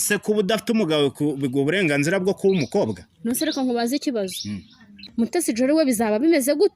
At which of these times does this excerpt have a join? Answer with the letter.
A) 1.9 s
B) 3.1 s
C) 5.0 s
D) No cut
C